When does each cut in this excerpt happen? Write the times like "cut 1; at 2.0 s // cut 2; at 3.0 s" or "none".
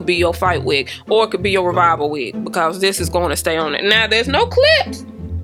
none